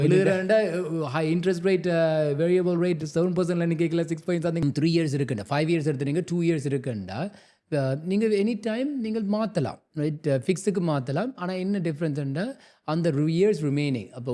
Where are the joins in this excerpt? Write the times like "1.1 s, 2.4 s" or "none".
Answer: 4.6 s